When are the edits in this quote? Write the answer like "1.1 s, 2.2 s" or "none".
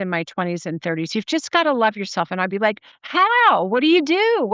none